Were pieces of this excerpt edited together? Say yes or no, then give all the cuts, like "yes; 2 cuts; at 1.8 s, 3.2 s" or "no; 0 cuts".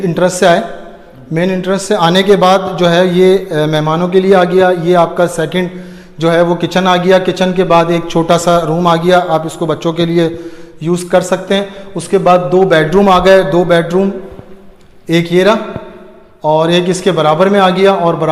no; 0 cuts